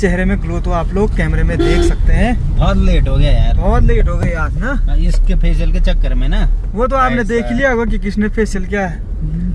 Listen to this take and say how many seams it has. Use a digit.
0